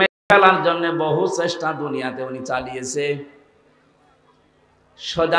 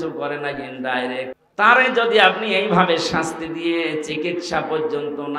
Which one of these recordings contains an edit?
second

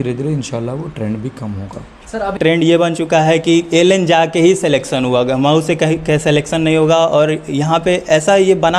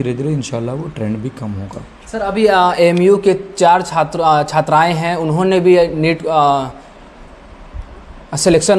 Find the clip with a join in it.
first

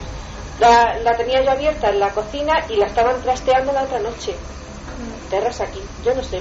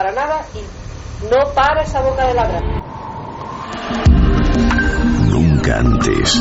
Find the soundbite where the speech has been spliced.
second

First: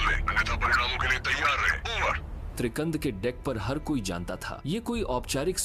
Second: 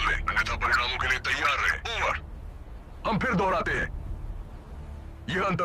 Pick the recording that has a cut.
second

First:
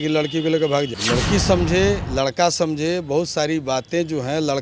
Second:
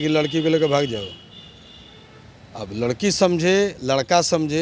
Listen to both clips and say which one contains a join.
first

